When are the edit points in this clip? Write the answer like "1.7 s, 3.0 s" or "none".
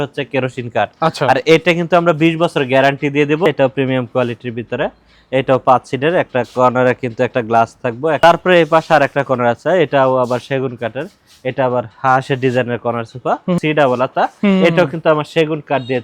3.5 s, 8.2 s, 13.6 s

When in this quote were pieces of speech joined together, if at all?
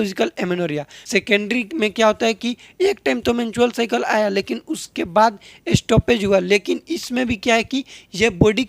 0.9 s

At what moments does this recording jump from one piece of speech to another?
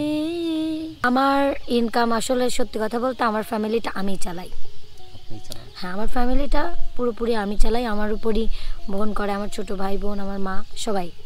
1.0 s

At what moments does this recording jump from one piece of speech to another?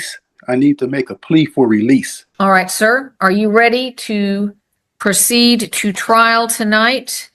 2.2 s

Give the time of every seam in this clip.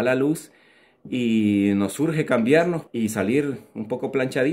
none

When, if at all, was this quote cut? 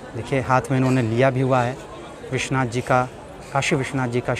none

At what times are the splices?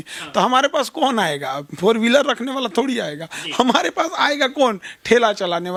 none

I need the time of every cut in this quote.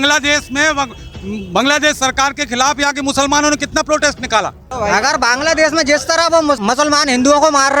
4.6 s

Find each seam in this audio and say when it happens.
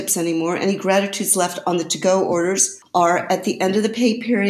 2.7 s

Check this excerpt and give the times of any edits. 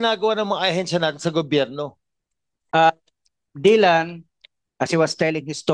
2.7 s

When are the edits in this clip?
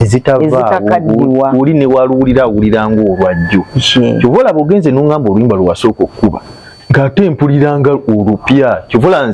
none

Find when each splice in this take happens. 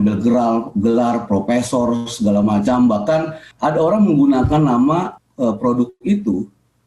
3.4 s, 5.2 s

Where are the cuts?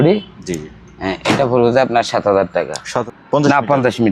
2.9 s

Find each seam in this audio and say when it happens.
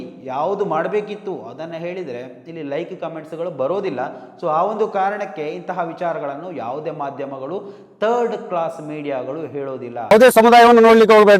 10.1 s

